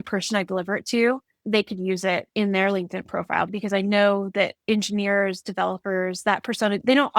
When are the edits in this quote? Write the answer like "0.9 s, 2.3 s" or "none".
1.3 s, 2.3 s, 3.0 s, 4.6 s